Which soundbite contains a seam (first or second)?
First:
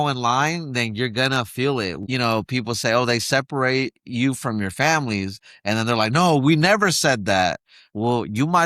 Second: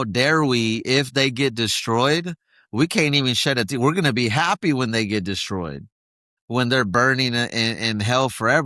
first